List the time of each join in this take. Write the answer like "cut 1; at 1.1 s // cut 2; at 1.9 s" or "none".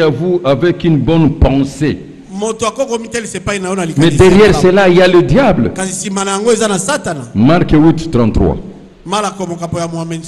none